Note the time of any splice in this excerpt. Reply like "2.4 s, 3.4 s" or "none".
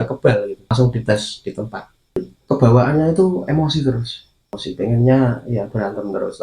0.7 s, 2.3 s, 4.6 s